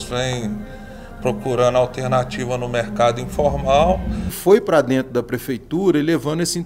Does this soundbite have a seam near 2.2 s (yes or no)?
no